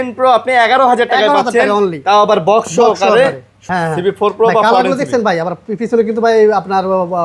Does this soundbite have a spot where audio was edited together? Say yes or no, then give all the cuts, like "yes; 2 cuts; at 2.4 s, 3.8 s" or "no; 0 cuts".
yes; 1 cut; at 3.6 s